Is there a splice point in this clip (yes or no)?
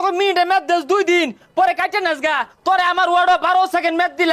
no